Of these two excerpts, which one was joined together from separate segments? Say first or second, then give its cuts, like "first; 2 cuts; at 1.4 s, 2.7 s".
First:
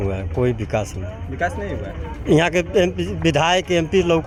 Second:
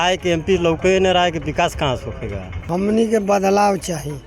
second; 1 cut; at 2.5 s